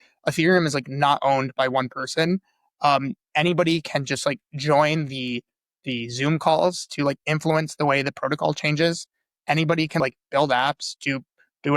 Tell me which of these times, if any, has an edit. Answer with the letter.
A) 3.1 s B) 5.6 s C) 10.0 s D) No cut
C